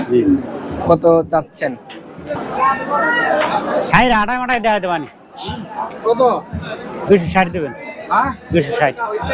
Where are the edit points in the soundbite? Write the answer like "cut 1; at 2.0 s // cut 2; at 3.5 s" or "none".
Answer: cut 1; at 2.4 s

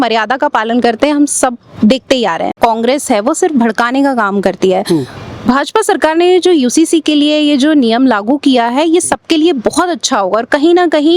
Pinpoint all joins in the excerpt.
cut 1; at 2.5 s

